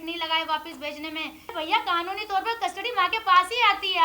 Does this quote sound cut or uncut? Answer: cut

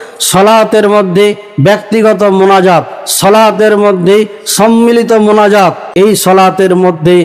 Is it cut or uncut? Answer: cut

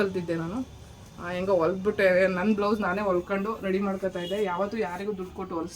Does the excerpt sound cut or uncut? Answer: uncut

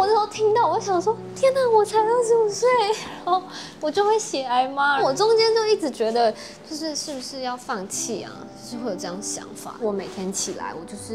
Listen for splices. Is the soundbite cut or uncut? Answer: cut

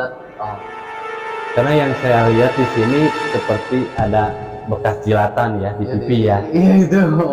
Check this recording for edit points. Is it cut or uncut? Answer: uncut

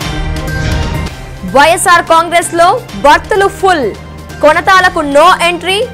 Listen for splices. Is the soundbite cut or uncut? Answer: cut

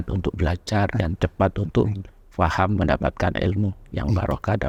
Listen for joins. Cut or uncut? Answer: uncut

